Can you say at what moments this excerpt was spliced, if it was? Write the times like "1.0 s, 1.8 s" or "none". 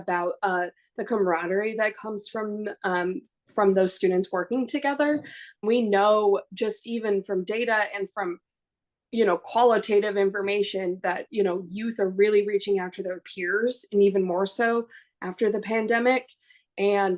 5.6 s